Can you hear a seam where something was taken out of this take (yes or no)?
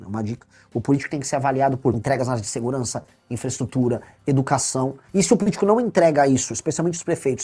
yes